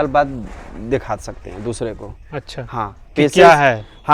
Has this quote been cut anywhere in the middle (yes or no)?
no